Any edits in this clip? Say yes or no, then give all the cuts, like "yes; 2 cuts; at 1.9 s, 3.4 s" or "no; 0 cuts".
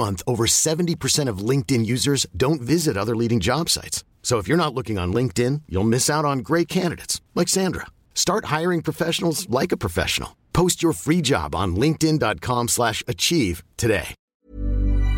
yes; 1 cut; at 14.2 s